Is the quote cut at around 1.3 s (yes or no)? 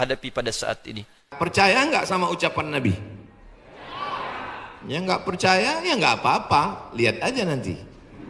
yes